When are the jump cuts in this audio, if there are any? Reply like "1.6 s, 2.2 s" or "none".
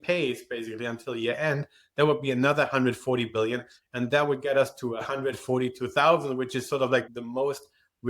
7.1 s